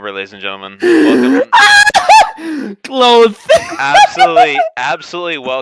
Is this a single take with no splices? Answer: yes; 0 cuts

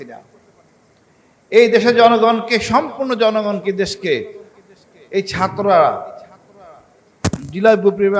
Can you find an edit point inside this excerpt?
no; 0 cuts

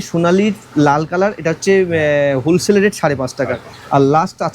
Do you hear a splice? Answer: no; 0 cuts

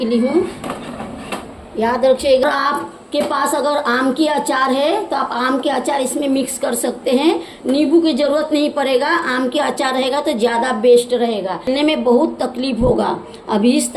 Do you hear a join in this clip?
yes; 2 cuts; at 2.4 s, 11.7 s

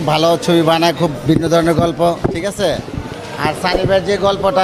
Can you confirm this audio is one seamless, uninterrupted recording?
yes; 0 cuts

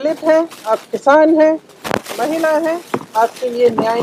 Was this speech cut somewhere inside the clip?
no; 0 cuts

